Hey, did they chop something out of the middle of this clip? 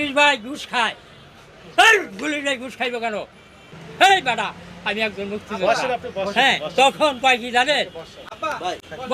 yes; 1 cut; at 3.8 s

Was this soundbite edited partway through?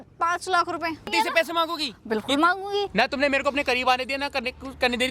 yes; 2 cuts; at 1.1 s, 2.9 s

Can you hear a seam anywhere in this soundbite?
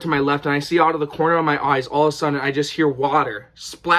no; 0 cuts

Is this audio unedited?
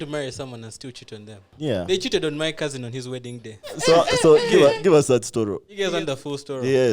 no; 3 cuts; at 1.5 s, 3.8 s, 5.7 s

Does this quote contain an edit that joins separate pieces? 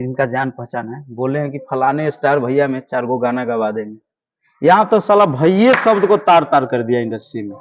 no; 0 cuts

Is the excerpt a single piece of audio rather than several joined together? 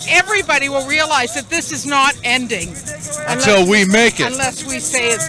yes; 0 cuts

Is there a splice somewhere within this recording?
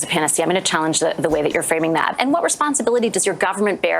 yes; 1 cut; at 2.1 s

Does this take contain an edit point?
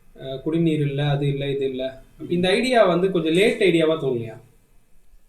yes; 1 cut; at 2.1 s

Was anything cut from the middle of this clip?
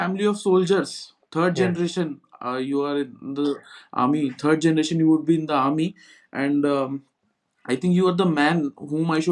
no; 0 cuts

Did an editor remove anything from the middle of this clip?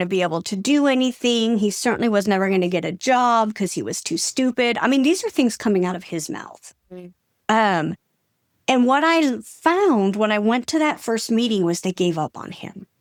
no; 0 cuts

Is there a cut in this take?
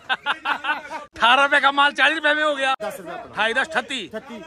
yes; 1 cut; at 2.8 s

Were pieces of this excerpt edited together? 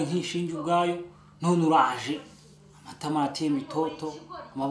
no; 0 cuts

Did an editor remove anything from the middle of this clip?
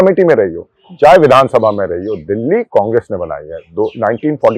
no; 0 cuts

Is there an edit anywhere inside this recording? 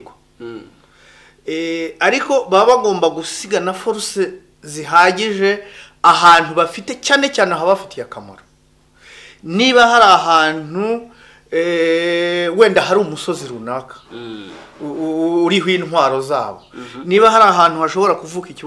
no; 0 cuts

